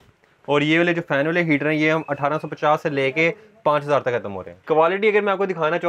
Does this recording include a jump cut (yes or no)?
yes